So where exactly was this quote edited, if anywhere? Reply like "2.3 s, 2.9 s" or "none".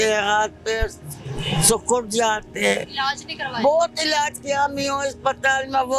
none